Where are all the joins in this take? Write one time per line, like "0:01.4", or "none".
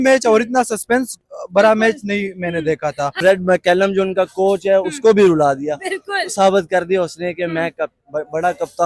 0:03.2